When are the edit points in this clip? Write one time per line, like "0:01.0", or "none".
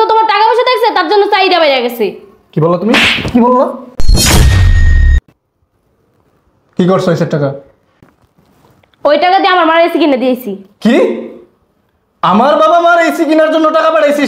0:05.2